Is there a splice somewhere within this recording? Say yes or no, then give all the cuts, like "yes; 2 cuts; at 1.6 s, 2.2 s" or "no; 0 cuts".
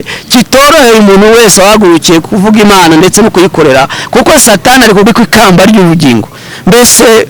yes; 1 cut; at 5.1 s